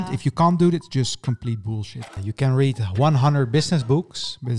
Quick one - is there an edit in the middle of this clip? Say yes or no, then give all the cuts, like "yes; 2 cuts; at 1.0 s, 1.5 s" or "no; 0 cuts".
yes; 1 cut; at 2.0 s